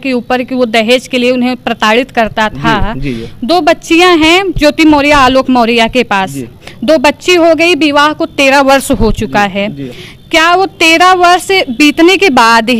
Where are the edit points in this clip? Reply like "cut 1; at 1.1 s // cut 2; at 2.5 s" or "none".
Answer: none